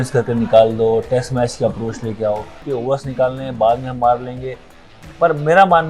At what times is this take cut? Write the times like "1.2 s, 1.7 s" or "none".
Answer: 2.6 s